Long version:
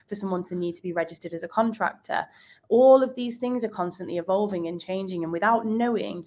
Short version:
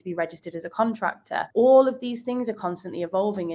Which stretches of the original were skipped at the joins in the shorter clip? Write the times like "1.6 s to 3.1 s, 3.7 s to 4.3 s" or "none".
2.3 s to 2.6 s